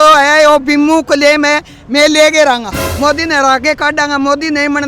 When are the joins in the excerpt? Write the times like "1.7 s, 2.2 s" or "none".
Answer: 2.8 s